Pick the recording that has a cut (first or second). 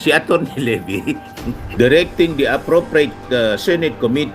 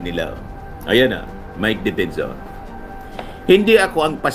first